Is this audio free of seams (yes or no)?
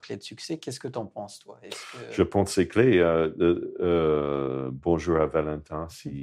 yes